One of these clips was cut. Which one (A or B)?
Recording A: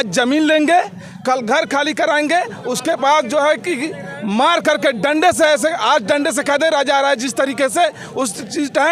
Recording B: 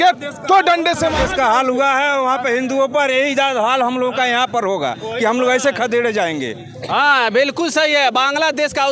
B